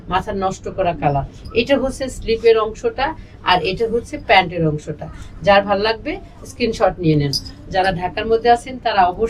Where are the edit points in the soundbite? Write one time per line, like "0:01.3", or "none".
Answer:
none